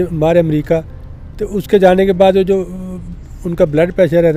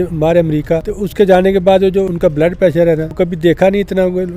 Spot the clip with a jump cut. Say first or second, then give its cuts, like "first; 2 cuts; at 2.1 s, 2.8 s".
second; 3 cuts; at 1.0 s, 2.1 s, 3.1 s